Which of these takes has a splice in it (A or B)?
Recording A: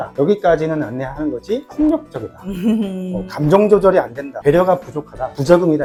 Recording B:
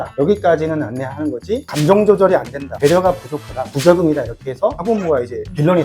B